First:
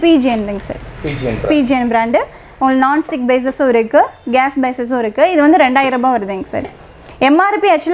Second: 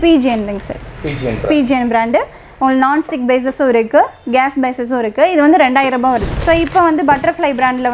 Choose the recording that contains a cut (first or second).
second